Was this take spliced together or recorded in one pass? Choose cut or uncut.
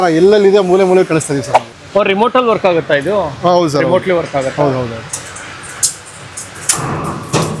cut